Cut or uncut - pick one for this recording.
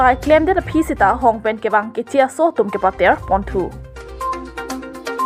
uncut